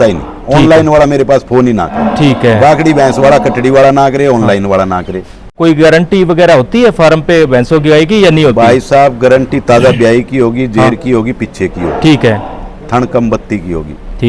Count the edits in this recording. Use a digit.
1